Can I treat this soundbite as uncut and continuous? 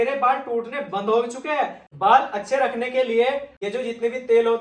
no; 2 cuts; at 1.8 s, 3.5 s

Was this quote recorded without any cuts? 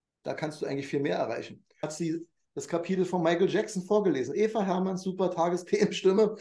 no; 1 cut; at 1.9 s

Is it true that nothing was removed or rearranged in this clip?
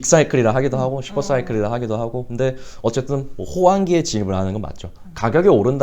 yes; 0 cuts

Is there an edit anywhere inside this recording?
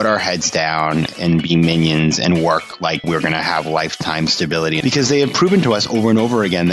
yes; 2 cuts; at 3.0 s, 4.8 s

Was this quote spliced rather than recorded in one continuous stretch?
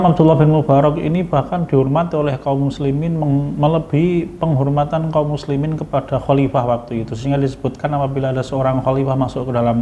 no; 0 cuts

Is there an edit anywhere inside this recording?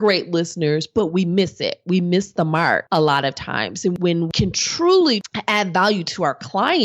yes; 3 cuts; at 2.8 s, 4.0 s, 5.3 s

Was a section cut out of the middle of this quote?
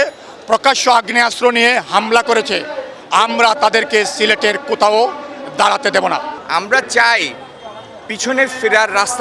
yes; 1 cut; at 6.4 s

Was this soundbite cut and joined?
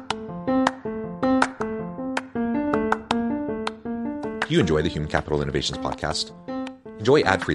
no; 0 cuts

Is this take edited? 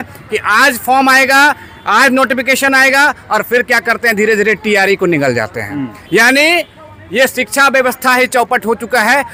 no; 0 cuts

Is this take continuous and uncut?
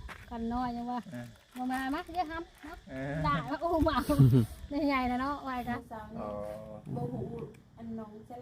no; 1 cut; at 5.7 s

